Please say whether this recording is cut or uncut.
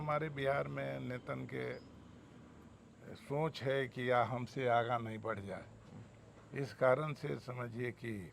uncut